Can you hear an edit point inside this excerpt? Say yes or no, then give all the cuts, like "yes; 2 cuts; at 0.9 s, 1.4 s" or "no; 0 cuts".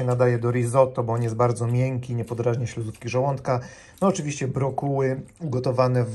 no; 0 cuts